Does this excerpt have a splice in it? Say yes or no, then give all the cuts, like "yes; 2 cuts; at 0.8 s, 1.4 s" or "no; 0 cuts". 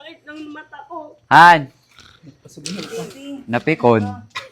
no; 0 cuts